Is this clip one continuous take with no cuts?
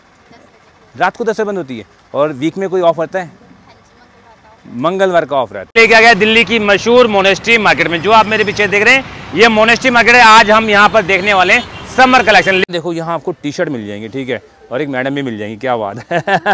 no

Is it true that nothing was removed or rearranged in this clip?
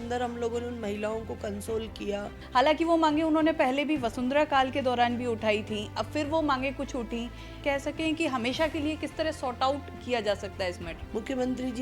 no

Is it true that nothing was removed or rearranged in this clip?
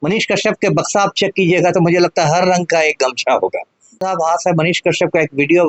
no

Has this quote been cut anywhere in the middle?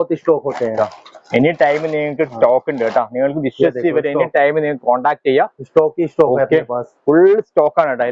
no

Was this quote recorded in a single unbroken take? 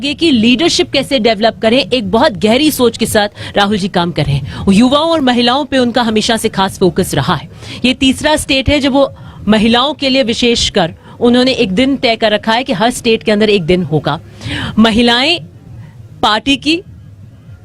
yes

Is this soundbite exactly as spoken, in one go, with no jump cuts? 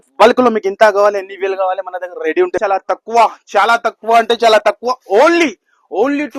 no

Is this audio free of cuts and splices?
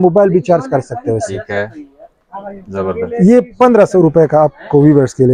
yes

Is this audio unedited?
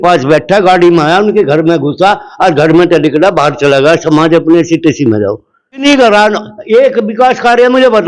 no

